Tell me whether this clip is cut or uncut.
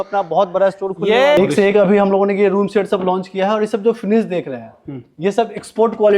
cut